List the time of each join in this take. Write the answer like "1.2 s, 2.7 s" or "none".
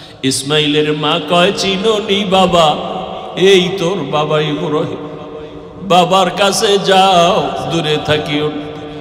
none